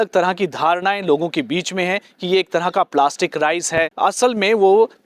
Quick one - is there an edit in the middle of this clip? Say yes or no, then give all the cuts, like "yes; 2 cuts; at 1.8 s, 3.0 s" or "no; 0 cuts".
yes; 1 cut; at 3.9 s